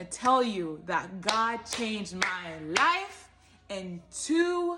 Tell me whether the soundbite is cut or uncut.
uncut